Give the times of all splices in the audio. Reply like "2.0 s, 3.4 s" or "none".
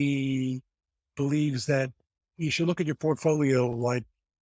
none